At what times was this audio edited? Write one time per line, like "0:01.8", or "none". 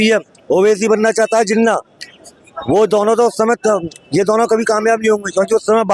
none